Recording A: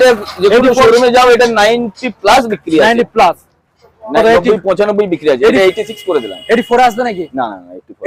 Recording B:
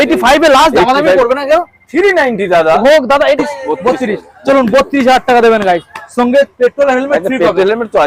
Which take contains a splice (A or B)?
B